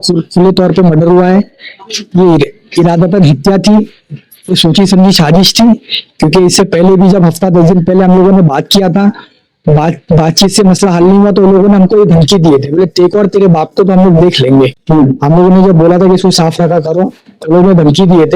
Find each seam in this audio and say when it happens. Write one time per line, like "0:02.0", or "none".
0:14.8